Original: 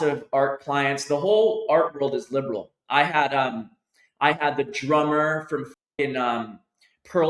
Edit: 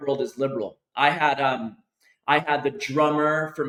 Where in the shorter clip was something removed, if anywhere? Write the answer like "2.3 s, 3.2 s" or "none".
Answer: none